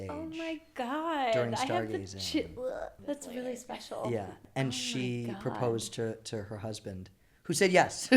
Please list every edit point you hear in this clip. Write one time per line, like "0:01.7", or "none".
0:02.9
0:04.4